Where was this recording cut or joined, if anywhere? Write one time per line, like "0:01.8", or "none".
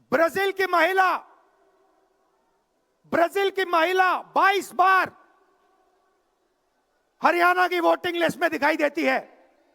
none